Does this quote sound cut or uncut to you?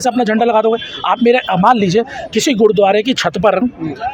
uncut